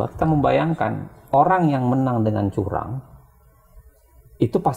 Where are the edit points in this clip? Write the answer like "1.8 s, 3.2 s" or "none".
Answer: none